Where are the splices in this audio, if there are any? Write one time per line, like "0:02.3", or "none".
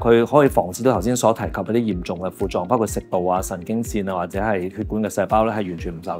none